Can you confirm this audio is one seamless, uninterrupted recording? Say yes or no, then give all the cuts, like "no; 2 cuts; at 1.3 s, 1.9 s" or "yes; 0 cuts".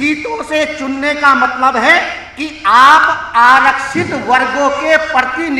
yes; 0 cuts